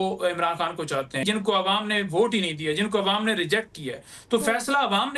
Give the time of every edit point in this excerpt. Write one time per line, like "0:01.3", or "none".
0:01.2

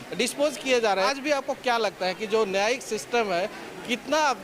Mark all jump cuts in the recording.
0:01.1

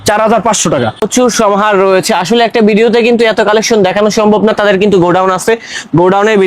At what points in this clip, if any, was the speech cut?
0:01.1

